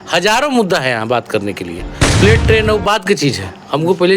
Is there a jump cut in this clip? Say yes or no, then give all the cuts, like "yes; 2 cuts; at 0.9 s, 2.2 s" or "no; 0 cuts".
yes; 1 cut; at 2.2 s